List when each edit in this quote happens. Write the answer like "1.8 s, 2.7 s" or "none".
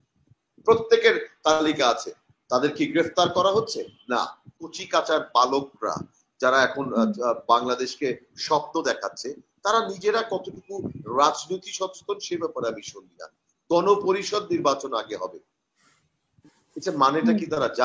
4.7 s